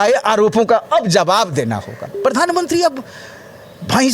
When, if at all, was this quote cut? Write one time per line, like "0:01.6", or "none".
0:02.1